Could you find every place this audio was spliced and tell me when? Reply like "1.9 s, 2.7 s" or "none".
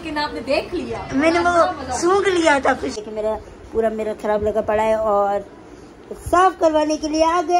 3.0 s